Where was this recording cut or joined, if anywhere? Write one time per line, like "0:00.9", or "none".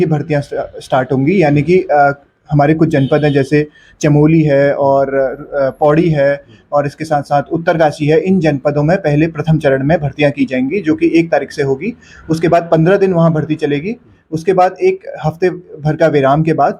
none